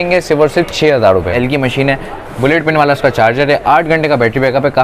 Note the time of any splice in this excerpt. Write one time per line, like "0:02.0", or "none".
0:01.4